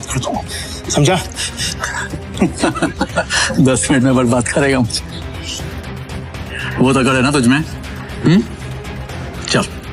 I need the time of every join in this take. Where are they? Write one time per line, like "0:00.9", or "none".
none

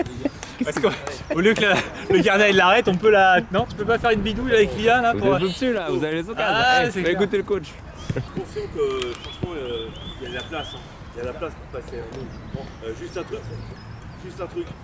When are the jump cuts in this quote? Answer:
0:08.2

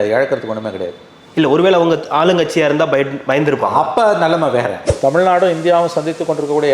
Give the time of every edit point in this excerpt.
0:04.8

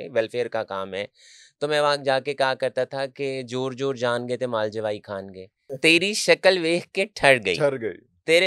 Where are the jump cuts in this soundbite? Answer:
0:05.8

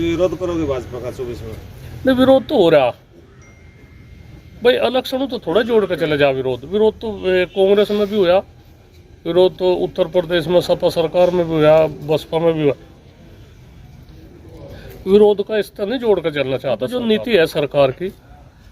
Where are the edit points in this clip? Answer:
0:16.9

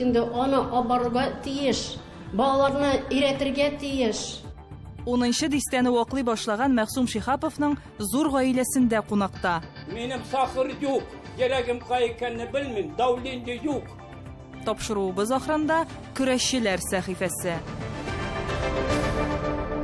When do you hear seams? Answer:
0:17.6

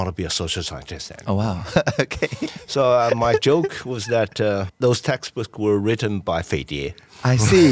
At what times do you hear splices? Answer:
0:04.7

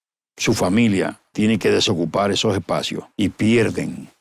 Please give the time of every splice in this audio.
0:01.2
0:03.0

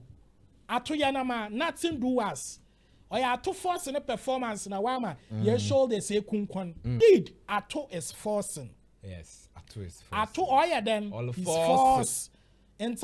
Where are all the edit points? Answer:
0:06.9

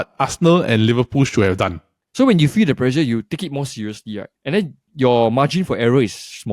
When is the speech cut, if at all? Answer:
0:02.0

